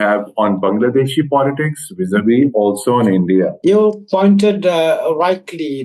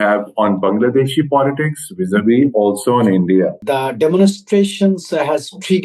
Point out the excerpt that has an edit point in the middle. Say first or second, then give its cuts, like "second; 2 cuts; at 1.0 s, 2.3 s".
second; 1 cut; at 3.6 s